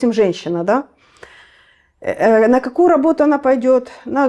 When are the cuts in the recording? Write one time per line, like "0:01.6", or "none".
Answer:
none